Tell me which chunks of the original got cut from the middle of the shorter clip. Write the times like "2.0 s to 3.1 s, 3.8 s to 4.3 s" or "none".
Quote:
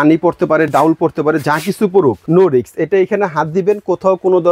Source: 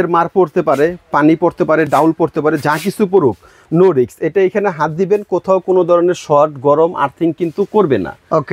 3.4 s to 3.6 s